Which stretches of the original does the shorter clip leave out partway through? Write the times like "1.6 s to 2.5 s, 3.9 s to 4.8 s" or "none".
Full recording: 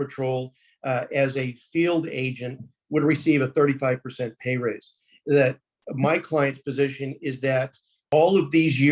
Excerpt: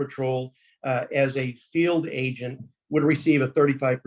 none